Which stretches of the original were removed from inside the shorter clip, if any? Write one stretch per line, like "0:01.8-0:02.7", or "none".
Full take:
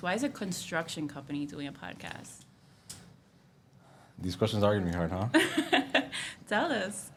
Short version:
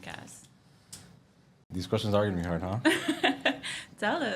0:03.7-0:04.2